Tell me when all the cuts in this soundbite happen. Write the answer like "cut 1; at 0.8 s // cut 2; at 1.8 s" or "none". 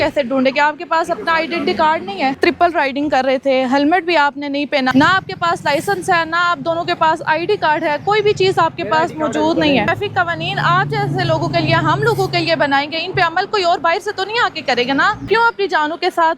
cut 1; at 2.4 s // cut 2; at 4.9 s // cut 3; at 9.9 s // cut 4; at 15.3 s